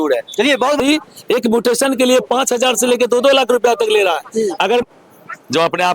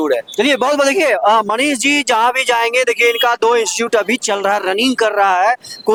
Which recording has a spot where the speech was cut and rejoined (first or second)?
first